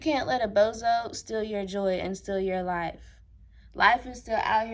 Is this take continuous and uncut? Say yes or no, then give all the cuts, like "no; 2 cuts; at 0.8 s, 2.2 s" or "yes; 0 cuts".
yes; 0 cuts